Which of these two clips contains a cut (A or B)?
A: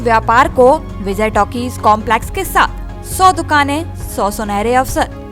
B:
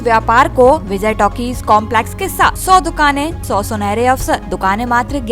B